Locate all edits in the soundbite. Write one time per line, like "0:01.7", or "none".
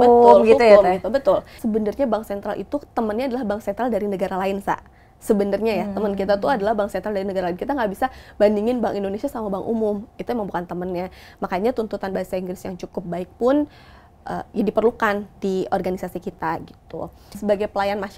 0:01.6
0:17.2